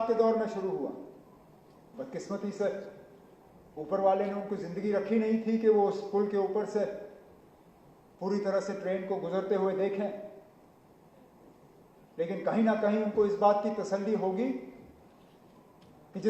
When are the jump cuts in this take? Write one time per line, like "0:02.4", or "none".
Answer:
none